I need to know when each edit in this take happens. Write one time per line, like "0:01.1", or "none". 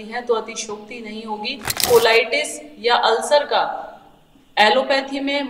0:01.8